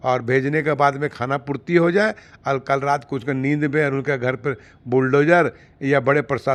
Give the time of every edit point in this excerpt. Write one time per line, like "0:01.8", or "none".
none